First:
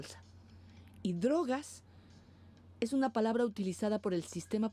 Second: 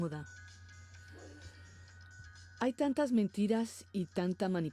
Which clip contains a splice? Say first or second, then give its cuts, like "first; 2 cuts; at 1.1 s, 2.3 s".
first; 1 cut; at 1.2 s